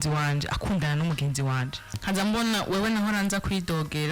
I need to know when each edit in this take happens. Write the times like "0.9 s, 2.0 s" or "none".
2.0 s